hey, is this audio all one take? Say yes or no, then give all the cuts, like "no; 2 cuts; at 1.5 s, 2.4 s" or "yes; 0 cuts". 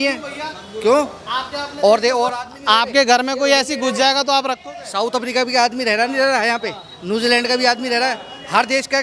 yes; 0 cuts